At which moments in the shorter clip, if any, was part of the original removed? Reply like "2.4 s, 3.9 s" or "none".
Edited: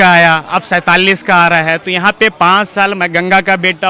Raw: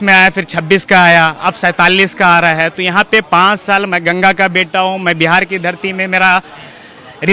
none

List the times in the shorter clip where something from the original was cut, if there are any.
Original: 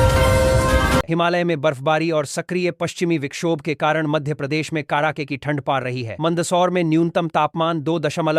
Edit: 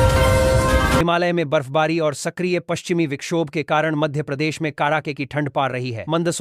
1.0 s

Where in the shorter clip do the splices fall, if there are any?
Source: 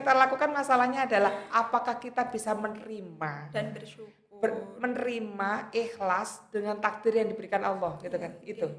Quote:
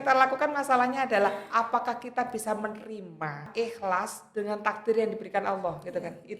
3.5 s

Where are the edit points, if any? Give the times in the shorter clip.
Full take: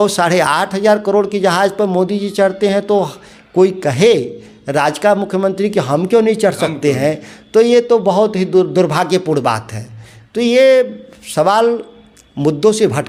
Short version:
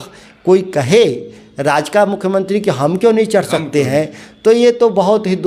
none

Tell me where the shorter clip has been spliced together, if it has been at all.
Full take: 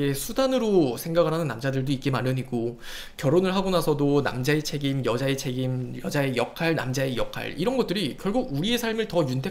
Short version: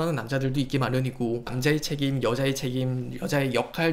1.5 s

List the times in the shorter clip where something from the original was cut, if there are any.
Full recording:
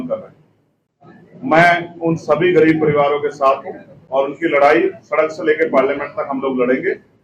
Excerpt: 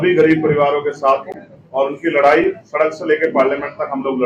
none

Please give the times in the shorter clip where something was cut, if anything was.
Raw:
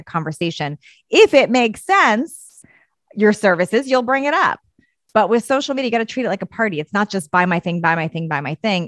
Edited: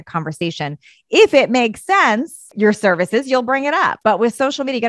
2.4 s, 4.0 s

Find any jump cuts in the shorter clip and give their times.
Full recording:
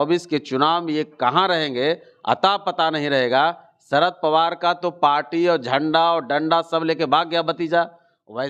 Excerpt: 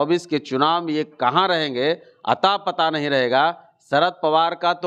none

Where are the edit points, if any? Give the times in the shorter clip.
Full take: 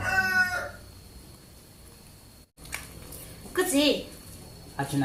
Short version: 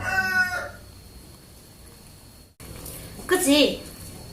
2.6 s

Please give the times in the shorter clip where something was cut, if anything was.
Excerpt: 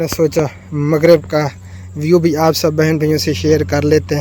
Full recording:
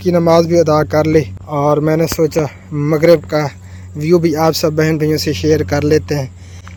none

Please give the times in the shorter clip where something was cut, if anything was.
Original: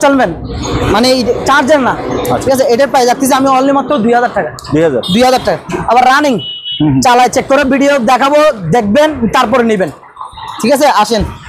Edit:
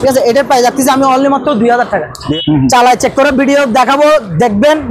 2.2 s

